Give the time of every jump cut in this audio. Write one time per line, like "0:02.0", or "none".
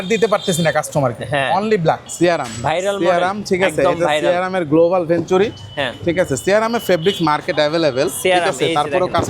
0:02.1